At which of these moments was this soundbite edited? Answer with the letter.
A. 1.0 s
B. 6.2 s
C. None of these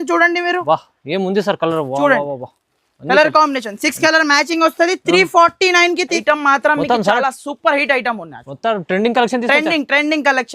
B